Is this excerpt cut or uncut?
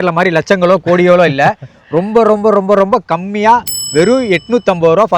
uncut